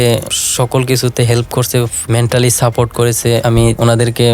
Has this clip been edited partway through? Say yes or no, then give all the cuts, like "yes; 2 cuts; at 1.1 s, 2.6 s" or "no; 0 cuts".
yes; 1 cut; at 3.4 s